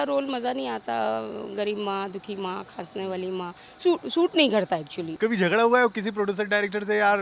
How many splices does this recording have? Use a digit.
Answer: 1